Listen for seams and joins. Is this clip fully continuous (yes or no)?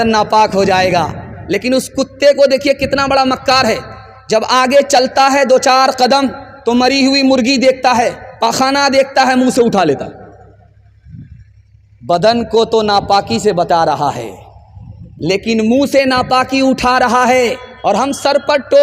no